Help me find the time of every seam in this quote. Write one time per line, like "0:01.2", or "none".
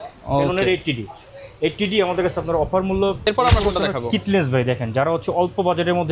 0:03.2